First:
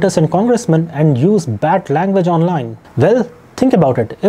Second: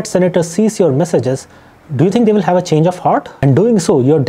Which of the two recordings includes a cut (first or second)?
second